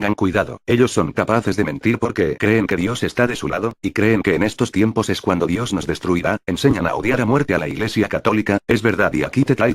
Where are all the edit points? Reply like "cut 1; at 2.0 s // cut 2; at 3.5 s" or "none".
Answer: cut 1; at 3.5 s